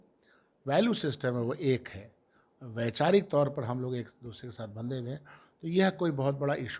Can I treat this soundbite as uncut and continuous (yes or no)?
yes